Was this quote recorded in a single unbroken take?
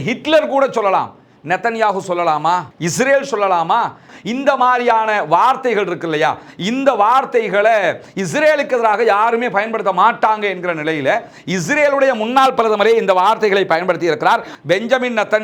no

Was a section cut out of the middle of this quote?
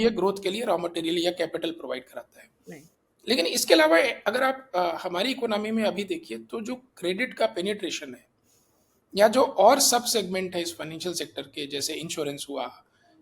no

